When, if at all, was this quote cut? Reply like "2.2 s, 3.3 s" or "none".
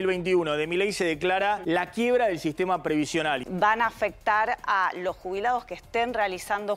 1.6 s, 3.4 s